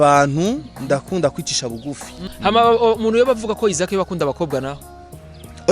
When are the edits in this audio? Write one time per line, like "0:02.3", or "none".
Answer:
0:02.3